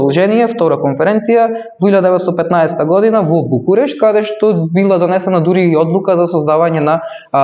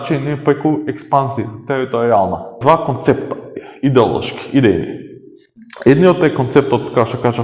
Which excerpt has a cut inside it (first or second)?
second